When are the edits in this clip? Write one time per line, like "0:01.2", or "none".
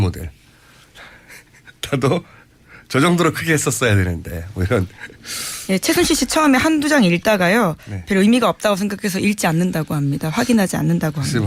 none